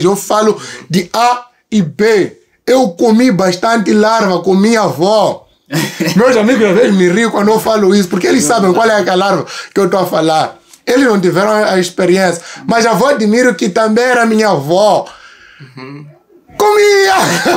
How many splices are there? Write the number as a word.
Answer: zero